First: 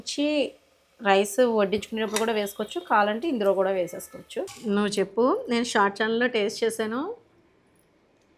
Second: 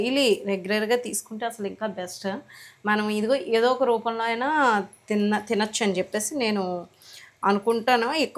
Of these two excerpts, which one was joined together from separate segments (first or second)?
first